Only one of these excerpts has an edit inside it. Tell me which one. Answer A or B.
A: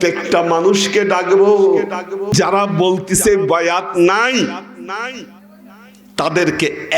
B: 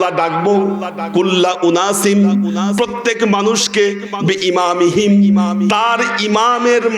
A